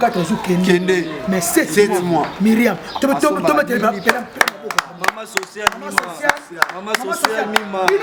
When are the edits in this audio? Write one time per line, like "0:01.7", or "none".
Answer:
none